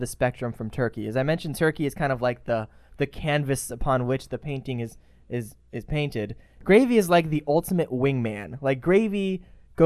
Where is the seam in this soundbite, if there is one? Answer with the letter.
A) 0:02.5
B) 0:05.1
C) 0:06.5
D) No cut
C